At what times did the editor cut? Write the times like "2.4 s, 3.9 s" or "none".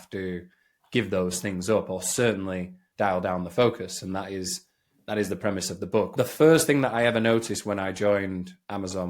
6.1 s